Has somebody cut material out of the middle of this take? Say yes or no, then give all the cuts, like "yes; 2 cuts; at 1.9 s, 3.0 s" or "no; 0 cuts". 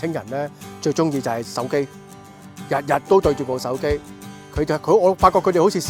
no; 0 cuts